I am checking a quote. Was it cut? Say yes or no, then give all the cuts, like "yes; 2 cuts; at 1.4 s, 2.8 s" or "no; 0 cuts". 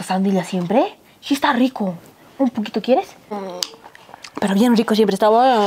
yes; 1 cut; at 3.2 s